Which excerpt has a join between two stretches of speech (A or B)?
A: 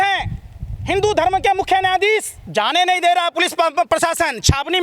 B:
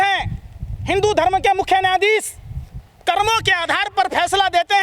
A